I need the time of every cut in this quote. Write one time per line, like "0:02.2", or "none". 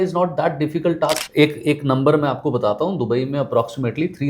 0:01.2